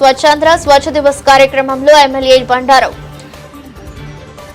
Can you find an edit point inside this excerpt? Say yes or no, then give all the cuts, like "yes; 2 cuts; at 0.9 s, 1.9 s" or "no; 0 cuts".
no; 0 cuts